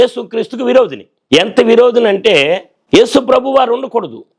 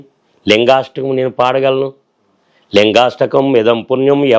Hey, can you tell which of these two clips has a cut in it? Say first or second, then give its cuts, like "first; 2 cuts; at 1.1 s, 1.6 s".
first; 2 cuts; at 1.1 s, 2.7 s